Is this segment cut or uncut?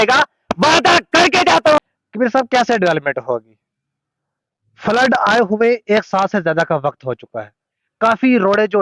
cut